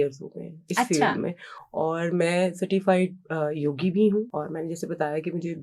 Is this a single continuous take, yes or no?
no